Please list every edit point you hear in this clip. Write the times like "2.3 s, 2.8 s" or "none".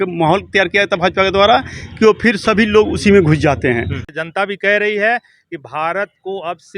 4.0 s